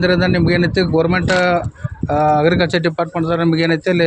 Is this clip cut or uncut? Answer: uncut